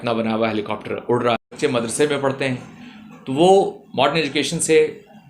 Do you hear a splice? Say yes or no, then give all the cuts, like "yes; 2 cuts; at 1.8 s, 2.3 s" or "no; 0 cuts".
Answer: yes; 1 cut; at 1.5 s